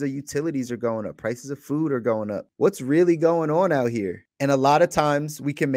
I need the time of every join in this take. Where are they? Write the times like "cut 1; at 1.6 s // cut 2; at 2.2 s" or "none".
cut 1; at 2.4 s // cut 2; at 4.2 s